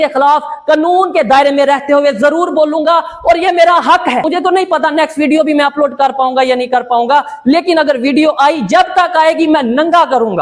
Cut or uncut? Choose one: cut